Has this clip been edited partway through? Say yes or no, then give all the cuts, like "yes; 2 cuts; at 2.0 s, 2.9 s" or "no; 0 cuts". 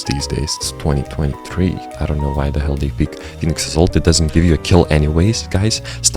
yes; 1 cut; at 1.9 s